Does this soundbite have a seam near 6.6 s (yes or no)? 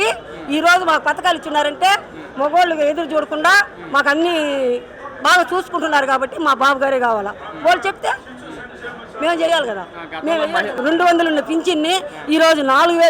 no